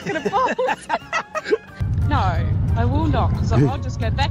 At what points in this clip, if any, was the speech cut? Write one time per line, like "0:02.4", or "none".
0:01.7